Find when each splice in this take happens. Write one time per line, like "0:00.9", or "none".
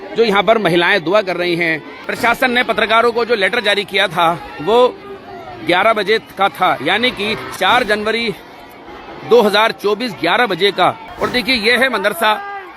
0:01.9
0:07.4
0:11.1